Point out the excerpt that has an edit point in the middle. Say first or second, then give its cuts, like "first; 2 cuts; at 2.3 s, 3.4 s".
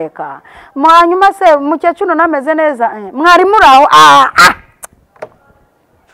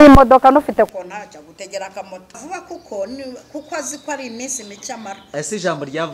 second; 1 cut; at 2.4 s